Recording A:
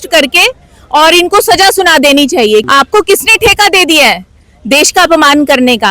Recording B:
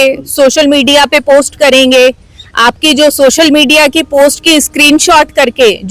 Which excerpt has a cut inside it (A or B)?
A